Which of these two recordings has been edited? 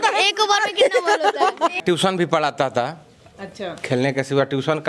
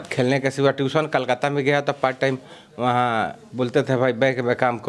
first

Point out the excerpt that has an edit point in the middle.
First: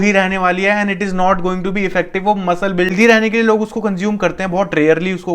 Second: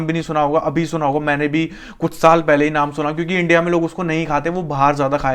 first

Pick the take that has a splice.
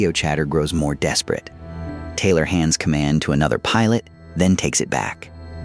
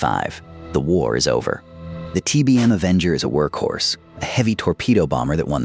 second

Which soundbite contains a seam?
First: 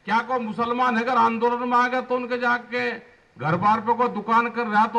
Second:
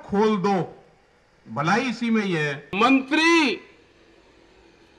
second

